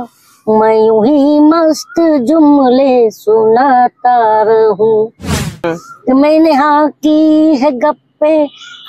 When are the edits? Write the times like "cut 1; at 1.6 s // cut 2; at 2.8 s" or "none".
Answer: cut 1; at 5.6 s

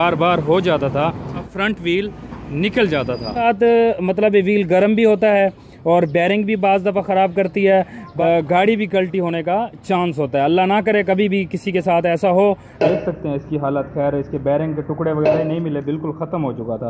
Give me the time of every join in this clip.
cut 1; at 1.5 s // cut 2; at 3.4 s // cut 3; at 8.0 s // cut 4; at 12.7 s

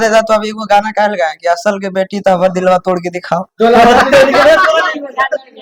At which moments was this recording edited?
none

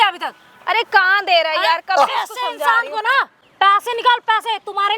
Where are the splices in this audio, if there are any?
cut 1; at 3.4 s

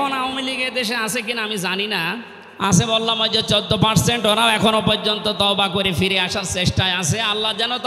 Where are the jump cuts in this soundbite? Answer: cut 1; at 2.4 s

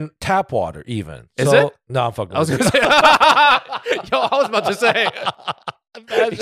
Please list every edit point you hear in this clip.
none

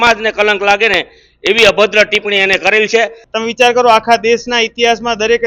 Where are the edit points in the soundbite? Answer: cut 1; at 3.3 s

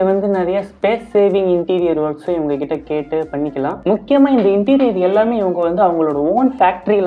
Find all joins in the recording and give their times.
cut 1; at 3.8 s

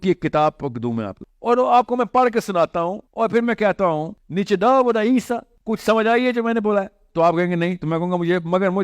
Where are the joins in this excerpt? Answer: cut 1; at 1.1 s // cut 2; at 3.0 s // cut 3; at 4.2 s // cut 4; at 5.5 s

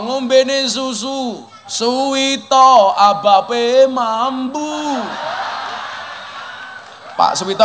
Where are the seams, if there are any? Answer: none

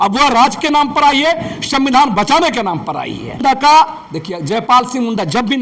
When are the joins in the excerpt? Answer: cut 1; at 3.4 s

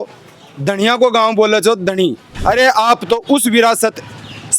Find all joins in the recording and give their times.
cut 1; at 2.3 s

